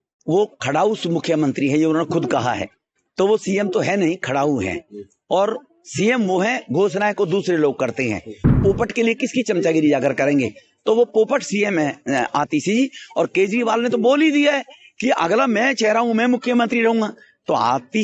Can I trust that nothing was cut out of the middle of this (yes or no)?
no